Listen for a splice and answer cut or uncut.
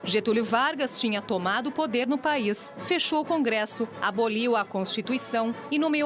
cut